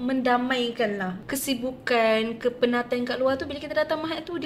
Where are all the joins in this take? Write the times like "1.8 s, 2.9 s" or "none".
1.1 s

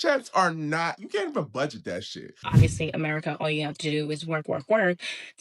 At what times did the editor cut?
2.4 s

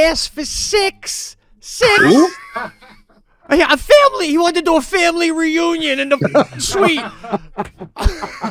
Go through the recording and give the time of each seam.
none

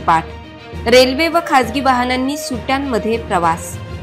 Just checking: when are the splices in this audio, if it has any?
none

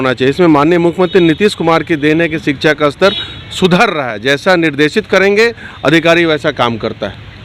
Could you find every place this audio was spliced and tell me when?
none

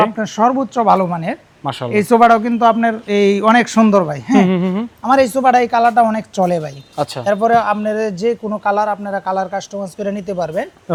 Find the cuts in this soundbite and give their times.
none

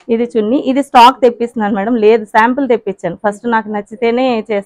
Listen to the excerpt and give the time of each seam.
none

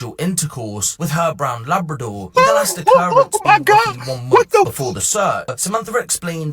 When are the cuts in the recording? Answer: 5.6 s

